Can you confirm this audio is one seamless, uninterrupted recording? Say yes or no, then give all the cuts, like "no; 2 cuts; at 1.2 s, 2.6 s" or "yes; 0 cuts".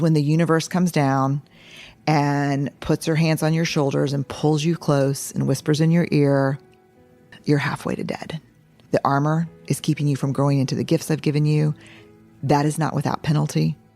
no; 2 cuts; at 7.3 s, 8.8 s